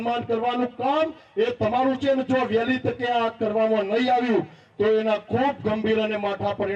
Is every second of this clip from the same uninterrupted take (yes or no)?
yes